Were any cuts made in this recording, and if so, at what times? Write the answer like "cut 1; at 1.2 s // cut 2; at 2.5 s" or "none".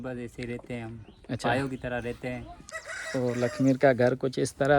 cut 1; at 2.6 s